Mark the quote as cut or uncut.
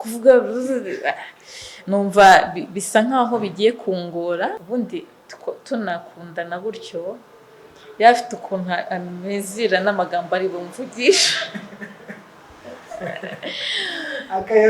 cut